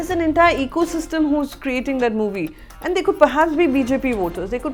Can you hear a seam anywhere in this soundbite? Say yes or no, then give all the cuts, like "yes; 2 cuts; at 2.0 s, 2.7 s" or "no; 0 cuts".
no; 0 cuts